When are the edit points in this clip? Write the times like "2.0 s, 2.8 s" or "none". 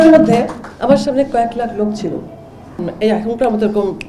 2.8 s